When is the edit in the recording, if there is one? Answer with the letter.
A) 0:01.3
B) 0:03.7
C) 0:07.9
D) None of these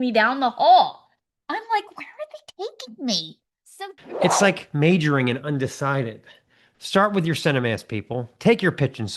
B